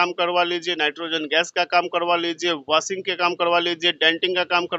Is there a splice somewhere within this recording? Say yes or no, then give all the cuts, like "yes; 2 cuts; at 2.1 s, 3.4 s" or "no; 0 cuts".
no; 0 cuts